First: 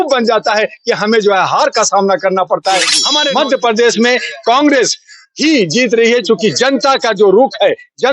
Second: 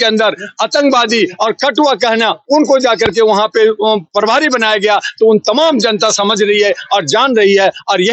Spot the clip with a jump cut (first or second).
first